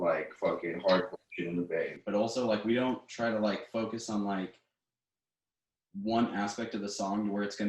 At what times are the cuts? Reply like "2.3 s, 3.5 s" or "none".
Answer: 1.9 s